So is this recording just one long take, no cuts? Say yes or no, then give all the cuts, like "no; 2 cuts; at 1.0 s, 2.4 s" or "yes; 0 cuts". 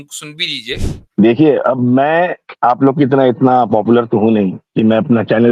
no; 1 cut; at 0.9 s